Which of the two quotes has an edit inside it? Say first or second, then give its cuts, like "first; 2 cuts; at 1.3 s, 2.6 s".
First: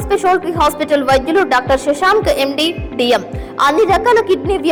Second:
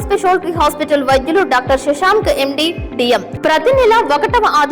second; 1 cut; at 3.3 s